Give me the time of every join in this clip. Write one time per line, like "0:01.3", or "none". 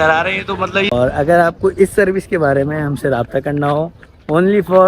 0:00.9